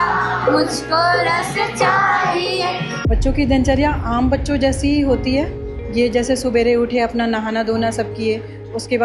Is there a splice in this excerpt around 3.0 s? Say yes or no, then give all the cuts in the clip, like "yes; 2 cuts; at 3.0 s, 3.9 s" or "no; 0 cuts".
yes; 1 cut; at 3.0 s